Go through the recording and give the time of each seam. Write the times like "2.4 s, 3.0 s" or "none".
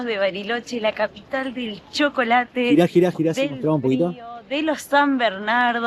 none